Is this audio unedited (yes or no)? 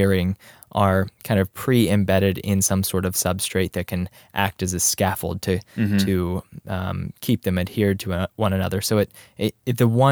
yes